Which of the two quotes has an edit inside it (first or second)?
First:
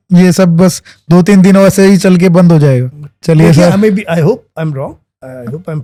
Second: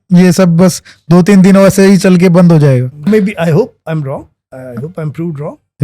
second